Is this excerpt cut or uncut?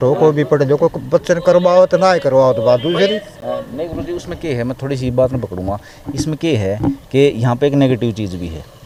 uncut